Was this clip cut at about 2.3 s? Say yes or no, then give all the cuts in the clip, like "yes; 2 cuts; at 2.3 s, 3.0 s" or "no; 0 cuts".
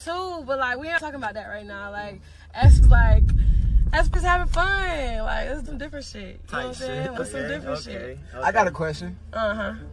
no; 0 cuts